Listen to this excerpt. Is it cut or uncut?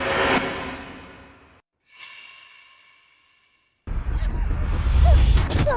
cut